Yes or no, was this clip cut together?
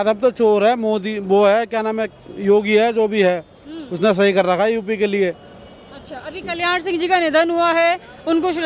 no